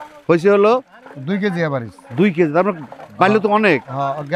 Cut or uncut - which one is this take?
uncut